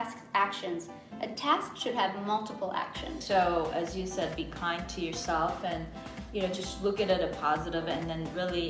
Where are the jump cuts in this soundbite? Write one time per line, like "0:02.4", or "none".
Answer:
0:03.2